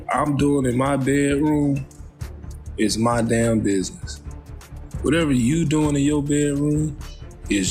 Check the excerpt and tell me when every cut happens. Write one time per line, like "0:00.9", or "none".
none